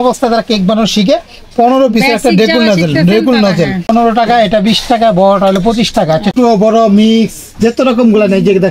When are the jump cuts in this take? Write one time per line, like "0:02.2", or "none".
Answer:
0:03.9
0:06.3